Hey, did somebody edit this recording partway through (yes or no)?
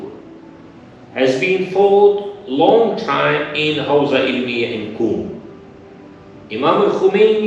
no